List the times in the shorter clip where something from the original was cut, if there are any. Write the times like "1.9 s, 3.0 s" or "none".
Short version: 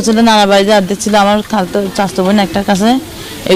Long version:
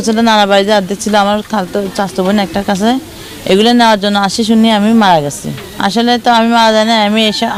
none